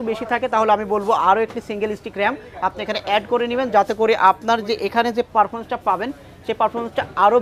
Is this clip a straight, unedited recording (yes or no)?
yes